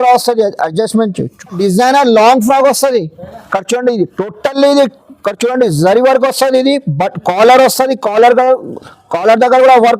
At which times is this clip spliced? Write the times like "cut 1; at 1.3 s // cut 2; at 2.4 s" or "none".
cut 1; at 1.6 s

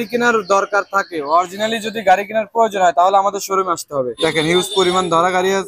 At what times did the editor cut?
cut 1; at 4.1 s

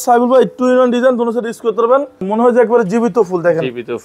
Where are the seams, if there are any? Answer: cut 1; at 2.2 s

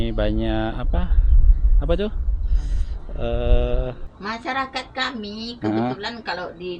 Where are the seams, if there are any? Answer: cut 1; at 4.1 s

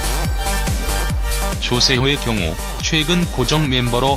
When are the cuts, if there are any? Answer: cut 1; at 2.4 s

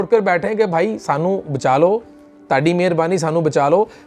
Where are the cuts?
none

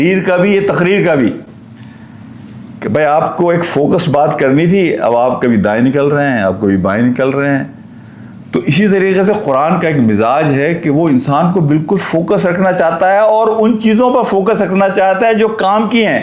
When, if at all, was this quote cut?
none

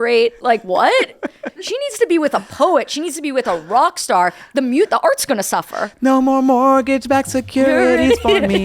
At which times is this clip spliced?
cut 1; at 1.4 s

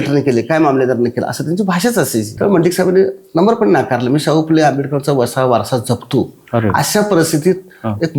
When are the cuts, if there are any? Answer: cut 1; at 2.3 s

